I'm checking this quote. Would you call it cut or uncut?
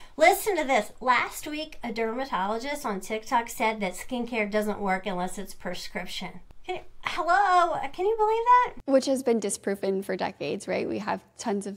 cut